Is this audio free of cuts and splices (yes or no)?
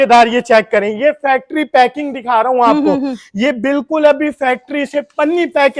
yes